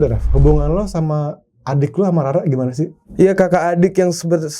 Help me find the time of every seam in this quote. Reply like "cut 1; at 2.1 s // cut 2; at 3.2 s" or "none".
cut 1; at 3.0 s